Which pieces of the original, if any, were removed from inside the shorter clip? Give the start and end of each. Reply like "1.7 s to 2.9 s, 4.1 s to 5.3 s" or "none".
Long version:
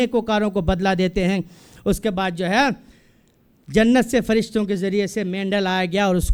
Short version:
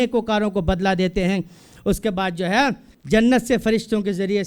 2.9 s to 3.5 s